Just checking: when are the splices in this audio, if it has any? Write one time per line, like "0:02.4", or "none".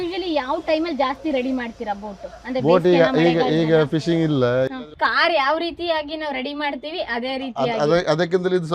0:04.7